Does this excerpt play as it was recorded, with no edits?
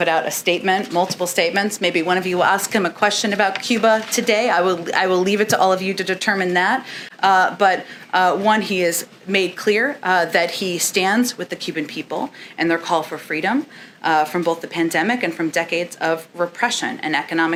yes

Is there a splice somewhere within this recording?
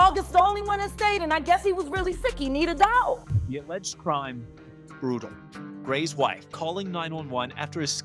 yes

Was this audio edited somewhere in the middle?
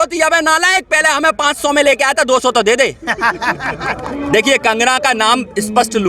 yes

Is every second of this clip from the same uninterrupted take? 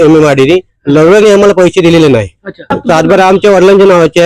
no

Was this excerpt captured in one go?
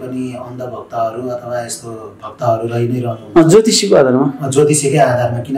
yes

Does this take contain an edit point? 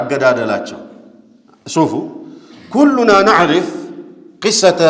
no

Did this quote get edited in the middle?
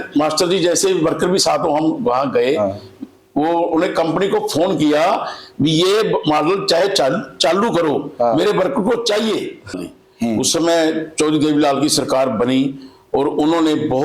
yes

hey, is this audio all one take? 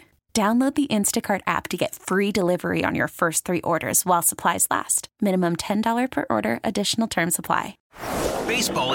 no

